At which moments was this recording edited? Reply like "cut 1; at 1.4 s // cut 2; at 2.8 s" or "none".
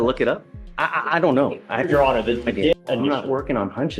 cut 1; at 2.7 s